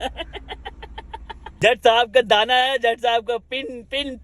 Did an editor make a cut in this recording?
yes; 1 cut; at 1.6 s

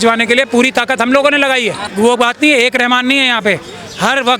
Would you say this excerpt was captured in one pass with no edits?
no; 1 cut; at 1.8 s

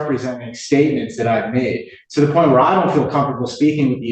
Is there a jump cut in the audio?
no; 0 cuts

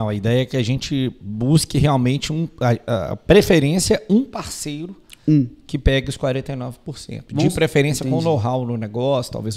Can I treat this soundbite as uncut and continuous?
yes; 0 cuts

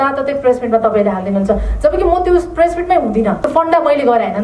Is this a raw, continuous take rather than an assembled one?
no; 1 cut; at 3.4 s

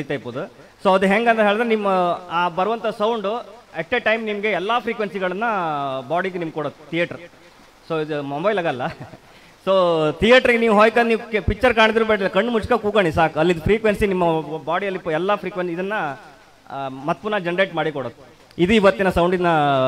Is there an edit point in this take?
no; 0 cuts

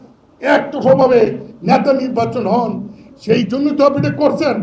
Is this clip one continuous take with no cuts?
yes; 0 cuts

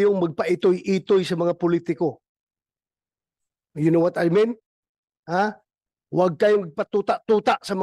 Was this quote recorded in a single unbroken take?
yes; 0 cuts

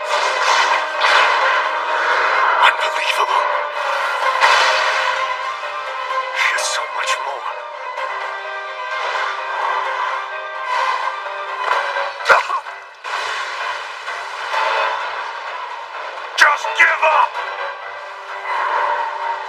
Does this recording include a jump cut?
no; 0 cuts

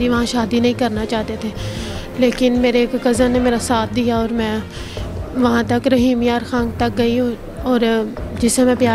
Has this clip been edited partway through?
no; 0 cuts

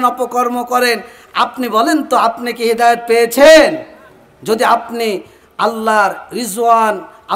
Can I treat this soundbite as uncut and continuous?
yes; 0 cuts

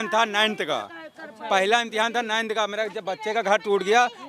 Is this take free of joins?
yes; 0 cuts

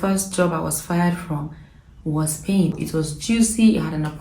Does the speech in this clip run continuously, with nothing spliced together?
no; 1 cut; at 2.8 s

